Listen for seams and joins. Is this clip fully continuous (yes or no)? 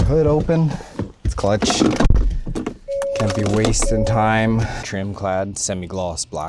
no